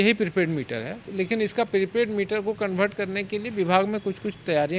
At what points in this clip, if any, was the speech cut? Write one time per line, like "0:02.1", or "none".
0:01.1